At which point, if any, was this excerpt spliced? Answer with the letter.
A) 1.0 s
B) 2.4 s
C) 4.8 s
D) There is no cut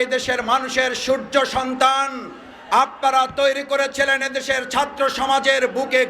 D